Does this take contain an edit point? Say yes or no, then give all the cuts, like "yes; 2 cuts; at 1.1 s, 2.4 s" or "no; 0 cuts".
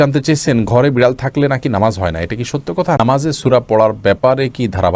yes; 1 cut; at 3.0 s